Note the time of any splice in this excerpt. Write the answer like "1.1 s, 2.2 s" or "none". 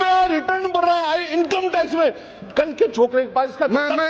none